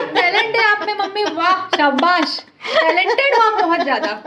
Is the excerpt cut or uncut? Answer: uncut